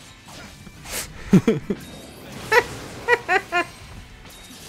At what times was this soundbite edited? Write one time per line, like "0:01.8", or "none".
0:00.9